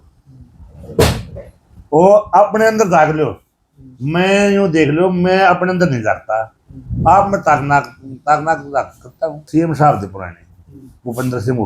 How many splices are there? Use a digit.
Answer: 1